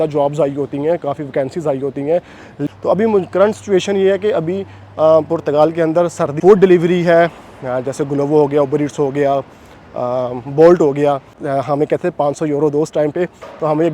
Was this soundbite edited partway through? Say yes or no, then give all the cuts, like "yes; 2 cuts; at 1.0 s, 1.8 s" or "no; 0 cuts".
yes; 3 cuts; at 2.6 s, 6.4 s, 11.4 s